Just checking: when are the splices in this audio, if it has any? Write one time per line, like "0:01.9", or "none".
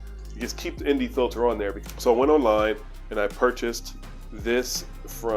0:01.8